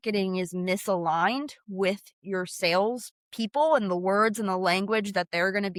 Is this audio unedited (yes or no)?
yes